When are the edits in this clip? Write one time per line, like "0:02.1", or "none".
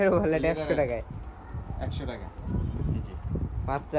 none